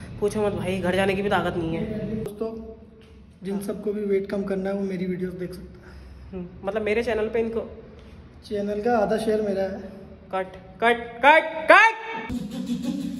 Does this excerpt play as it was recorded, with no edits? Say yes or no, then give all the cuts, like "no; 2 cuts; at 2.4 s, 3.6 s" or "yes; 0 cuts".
no; 2 cuts; at 2.3 s, 12.3 s